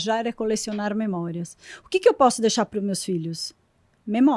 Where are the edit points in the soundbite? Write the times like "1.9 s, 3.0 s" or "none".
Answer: none